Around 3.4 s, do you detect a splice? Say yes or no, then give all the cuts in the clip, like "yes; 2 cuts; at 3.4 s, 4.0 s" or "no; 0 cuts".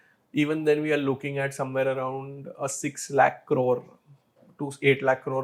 no; 0 cuts